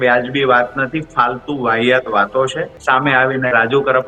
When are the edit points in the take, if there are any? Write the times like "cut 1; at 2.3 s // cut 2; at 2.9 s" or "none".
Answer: cut 1; at 2.7 s